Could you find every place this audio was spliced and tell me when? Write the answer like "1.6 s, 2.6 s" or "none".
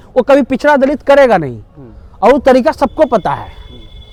none